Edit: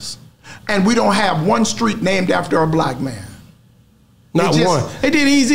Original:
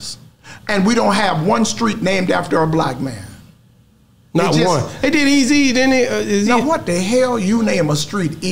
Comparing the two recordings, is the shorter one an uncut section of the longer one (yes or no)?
yes